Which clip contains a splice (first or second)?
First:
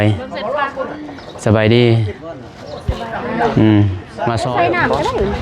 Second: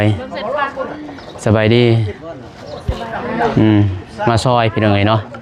first